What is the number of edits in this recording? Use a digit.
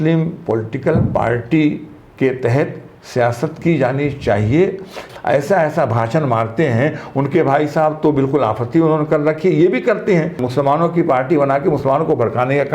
2